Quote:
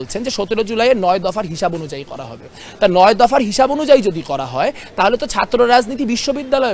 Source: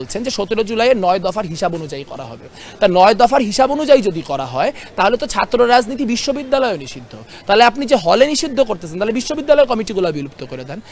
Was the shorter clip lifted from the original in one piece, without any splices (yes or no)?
yes